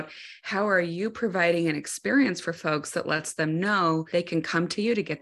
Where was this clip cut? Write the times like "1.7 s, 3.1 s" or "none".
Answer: 4.1 s